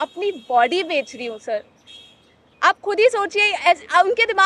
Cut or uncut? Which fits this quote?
uncut